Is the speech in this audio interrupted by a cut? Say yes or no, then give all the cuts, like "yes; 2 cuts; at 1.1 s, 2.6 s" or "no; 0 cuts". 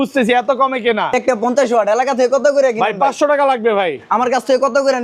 yes; 1 cut; at 1.1 s